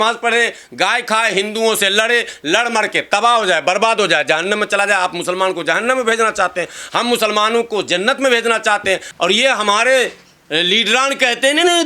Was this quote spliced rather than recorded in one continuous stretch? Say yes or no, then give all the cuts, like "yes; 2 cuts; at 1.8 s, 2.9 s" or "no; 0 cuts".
yes; 1 cut; at 9.1 s